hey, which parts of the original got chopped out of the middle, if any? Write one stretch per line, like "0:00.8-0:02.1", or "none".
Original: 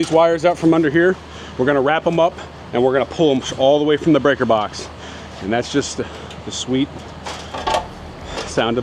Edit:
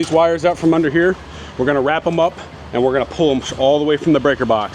none